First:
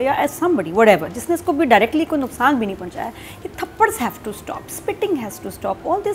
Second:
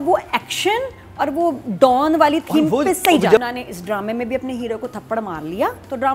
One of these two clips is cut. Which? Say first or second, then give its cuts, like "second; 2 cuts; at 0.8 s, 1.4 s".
second; 1 cut; at 3.4 s